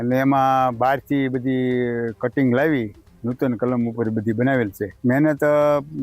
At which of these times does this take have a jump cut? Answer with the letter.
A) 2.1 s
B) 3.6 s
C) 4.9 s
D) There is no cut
C